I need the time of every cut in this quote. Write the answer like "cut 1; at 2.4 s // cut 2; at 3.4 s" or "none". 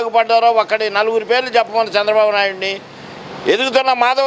none